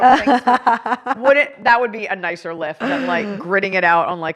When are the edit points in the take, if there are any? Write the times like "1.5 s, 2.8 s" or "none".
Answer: 1.2 s